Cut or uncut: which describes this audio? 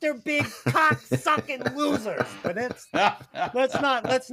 uncut